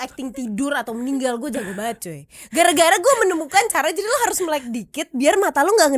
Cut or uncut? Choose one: uncut